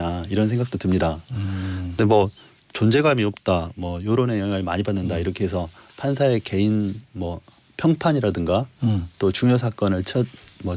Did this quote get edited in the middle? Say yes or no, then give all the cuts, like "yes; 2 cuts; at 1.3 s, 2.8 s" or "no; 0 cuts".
no; 0 cuts